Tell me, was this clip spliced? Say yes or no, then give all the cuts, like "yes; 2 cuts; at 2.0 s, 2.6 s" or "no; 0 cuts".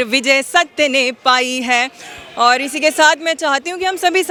no; 0 cuts